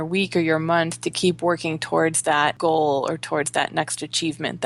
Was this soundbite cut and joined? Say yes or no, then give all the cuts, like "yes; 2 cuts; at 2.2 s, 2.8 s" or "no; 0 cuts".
yes; 1 cut; at 2.6 s